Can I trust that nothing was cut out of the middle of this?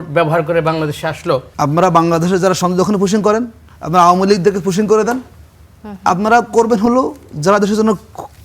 no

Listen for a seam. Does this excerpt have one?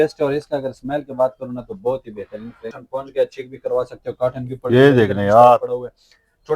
yes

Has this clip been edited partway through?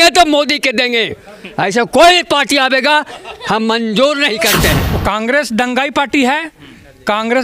yes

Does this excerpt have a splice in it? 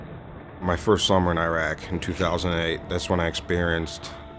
yes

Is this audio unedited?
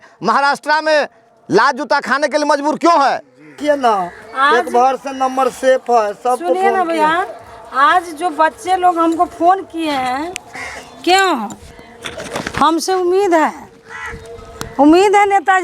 no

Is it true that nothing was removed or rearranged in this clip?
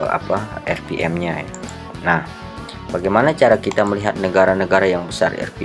yes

